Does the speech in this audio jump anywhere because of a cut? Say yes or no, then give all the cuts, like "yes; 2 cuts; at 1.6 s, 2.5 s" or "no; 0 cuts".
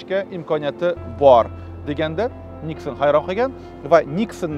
no; 0 cuts